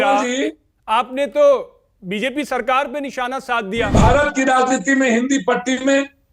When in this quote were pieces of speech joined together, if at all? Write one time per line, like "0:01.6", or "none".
0:03.9

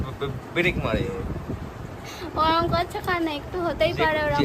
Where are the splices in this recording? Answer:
0:01.5

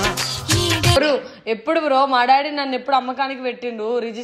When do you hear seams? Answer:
0:01.0

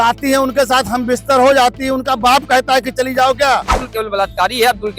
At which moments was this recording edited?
0:03.9

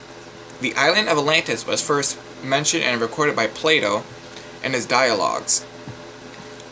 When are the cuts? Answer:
0:02.6

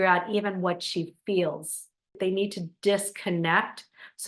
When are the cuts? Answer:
0:02.1

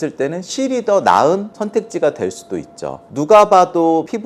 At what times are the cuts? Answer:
0:03.0

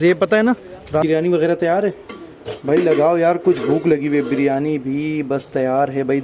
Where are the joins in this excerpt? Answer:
0:01.0

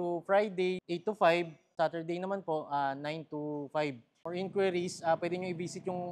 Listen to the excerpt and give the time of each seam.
0:00.8
0:01.7
0:04.2

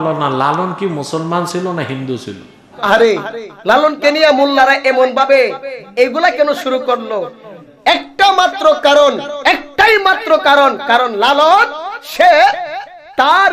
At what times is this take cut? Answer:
0:02.8

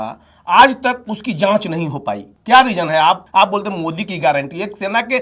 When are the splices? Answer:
0:02.3
0:03.2

